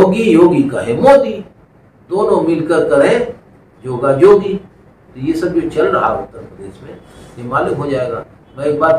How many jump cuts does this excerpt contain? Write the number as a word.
zero